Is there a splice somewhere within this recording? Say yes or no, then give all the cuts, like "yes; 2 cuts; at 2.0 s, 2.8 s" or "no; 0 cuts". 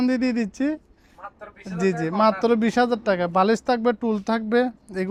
no; 0 cuts